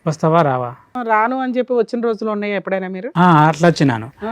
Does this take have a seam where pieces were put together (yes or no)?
yes